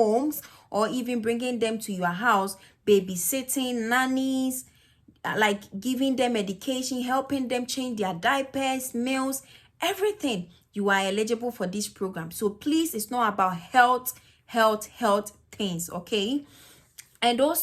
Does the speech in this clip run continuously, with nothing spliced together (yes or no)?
yes